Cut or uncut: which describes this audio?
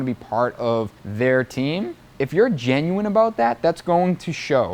cut